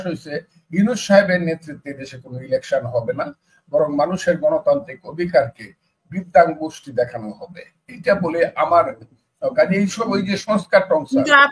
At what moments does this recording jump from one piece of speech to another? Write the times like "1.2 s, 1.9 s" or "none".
none